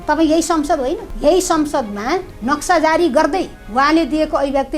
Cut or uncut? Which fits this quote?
cut